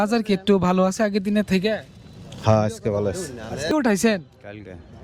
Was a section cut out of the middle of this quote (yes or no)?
yes